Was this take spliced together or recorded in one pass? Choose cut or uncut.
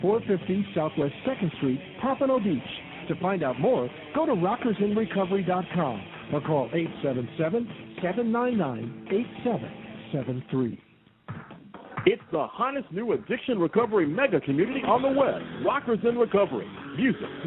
uncut